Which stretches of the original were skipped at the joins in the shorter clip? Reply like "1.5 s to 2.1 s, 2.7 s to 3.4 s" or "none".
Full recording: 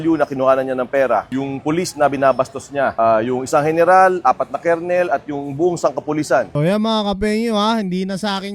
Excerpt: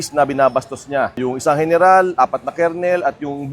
3.0 s to 3.2 s

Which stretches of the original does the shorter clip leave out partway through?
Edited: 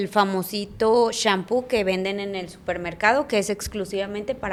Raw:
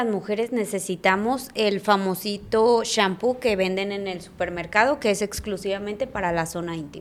none

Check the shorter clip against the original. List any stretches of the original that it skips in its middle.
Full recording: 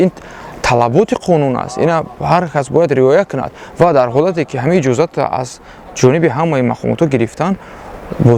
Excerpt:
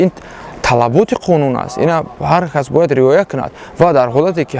none

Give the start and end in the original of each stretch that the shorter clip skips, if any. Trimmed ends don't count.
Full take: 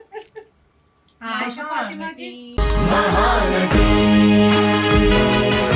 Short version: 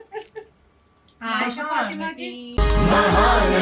none

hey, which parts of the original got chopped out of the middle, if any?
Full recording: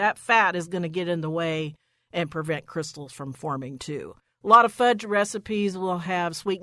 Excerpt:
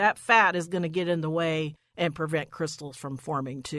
1.8 s to 2.0 s

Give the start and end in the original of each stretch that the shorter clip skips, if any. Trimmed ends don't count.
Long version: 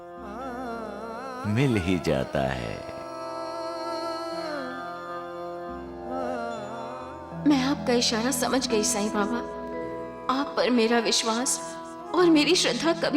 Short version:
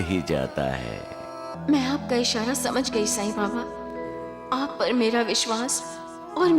3.2 s to 7.2 s

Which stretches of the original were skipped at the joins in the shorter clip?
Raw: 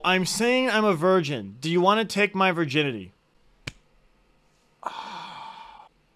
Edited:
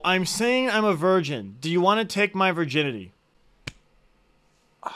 none

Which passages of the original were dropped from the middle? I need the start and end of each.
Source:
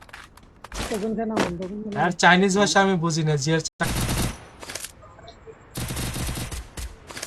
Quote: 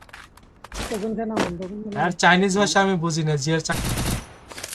3.6 s to 3.8 s

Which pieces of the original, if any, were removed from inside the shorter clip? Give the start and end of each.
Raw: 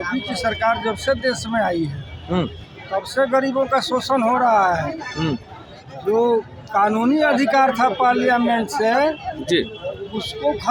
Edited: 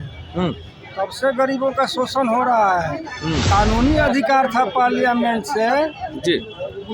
5.4 s to 6.7 s

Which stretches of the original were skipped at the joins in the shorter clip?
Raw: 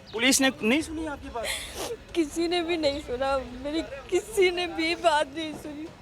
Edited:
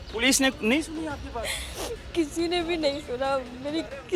none

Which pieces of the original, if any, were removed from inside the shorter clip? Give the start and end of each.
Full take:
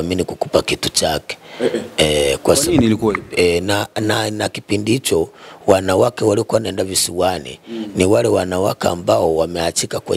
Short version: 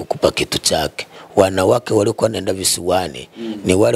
1.4 s to 5.4 s

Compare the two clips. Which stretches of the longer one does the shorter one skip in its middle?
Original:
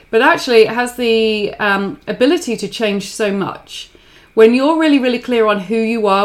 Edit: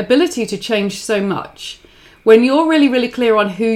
none

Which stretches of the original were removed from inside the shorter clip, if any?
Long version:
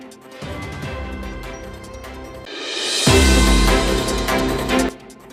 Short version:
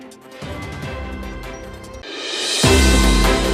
2.0 s to 2.4 s

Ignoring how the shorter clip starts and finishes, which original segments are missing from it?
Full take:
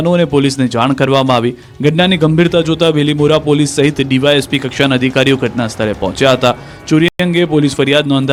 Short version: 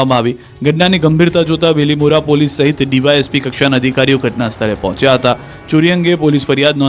7.1 s to 7.2 s

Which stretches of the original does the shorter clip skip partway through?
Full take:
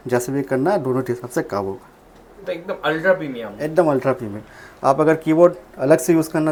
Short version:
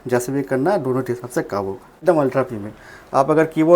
2.0 s to 3.7 s

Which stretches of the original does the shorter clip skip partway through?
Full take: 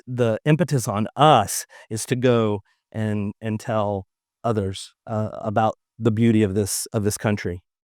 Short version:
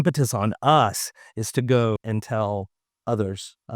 2.5 s to 3.3 s

